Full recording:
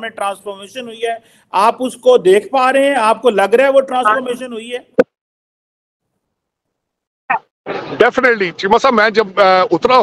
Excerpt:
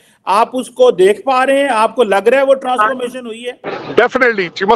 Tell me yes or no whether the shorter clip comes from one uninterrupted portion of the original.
no